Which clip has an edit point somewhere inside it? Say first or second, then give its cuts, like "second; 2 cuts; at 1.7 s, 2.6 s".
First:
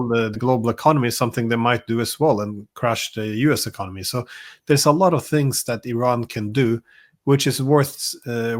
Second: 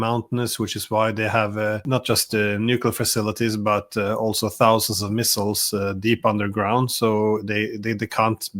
second; 1 cut; at 1.8 s